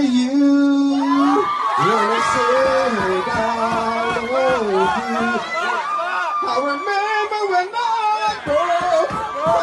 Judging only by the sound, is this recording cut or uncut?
uncut